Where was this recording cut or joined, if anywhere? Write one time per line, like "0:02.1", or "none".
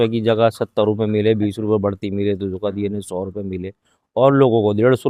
none